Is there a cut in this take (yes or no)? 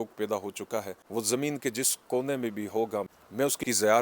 yes